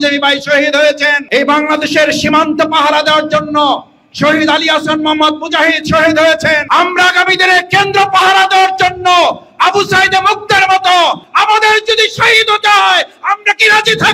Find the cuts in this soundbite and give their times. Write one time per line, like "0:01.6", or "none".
0:01.2
0:06.6
0:11.3